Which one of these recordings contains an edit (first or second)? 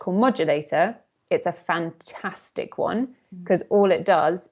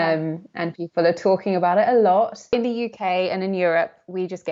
second